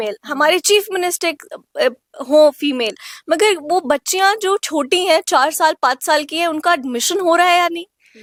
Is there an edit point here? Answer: no; 0 cuts

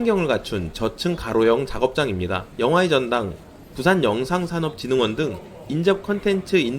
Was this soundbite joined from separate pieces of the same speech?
no; 0 cuts

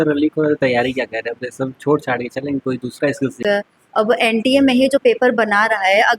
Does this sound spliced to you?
yes; 1 cut; at 3.4 s

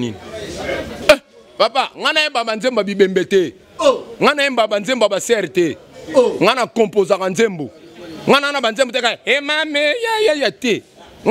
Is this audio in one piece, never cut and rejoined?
no; 1 cut; at 1.0 s

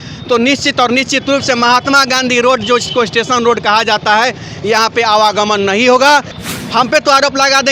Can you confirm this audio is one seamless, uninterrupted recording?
no; 1 cut; at 6.4 s

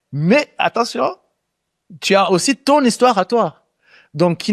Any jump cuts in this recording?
no; 0 cuts

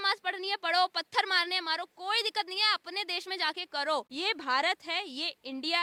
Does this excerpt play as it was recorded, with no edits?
yes; 0 cuts

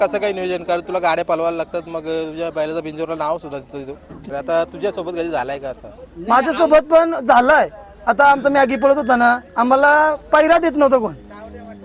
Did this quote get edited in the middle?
yes; 1 cut; at 4.1 s

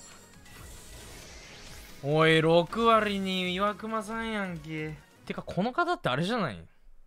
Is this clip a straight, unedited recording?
no; 1 cut; at 5.1 s

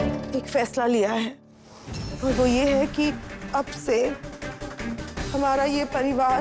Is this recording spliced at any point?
yes; 1 cut; at 2.1 s

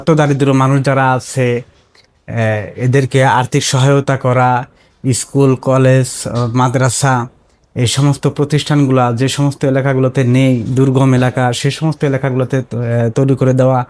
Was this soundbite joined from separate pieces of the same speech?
no; 0 cuts

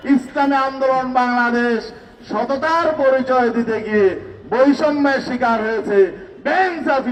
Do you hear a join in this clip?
no; 0 cuts

